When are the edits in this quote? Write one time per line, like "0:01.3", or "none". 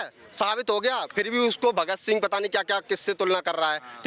none